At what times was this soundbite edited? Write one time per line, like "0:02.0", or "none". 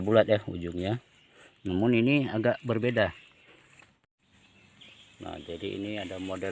0:03.5